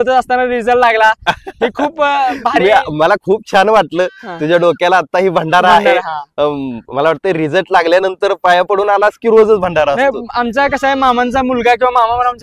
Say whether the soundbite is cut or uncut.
uncut